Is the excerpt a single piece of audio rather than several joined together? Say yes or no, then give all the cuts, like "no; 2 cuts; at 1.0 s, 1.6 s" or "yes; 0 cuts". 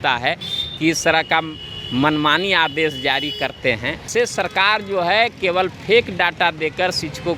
no; 1 cut; at 4.1 s